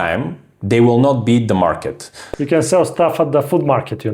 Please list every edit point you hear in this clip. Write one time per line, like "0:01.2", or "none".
0:02.2